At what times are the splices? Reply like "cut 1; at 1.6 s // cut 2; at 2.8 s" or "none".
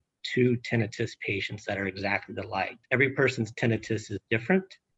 cut 1; at 2.8 s